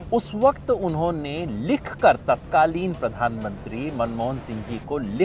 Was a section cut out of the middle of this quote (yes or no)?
no